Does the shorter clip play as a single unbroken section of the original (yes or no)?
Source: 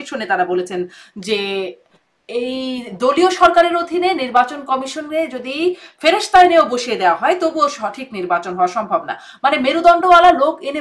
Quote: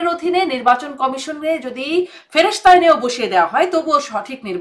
yes